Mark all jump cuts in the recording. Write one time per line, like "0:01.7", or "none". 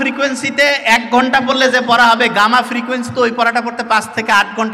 none